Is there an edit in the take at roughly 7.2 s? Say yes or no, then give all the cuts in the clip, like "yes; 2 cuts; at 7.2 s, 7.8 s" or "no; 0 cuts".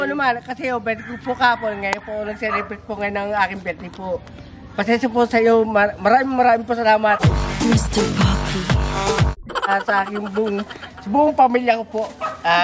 no; 0 cuts